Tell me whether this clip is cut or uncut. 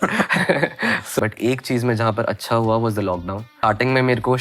cut